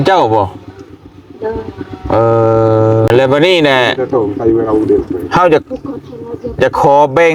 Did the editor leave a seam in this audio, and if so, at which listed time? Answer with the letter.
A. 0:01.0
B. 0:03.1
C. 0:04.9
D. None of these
B